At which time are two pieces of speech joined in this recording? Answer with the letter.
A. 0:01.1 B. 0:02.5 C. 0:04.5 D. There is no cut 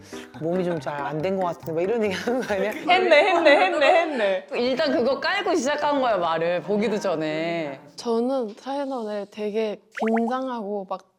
D